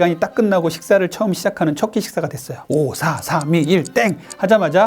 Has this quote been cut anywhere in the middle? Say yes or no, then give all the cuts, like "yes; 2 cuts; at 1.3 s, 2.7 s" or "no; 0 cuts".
yes; 1 cut; at 2.5 s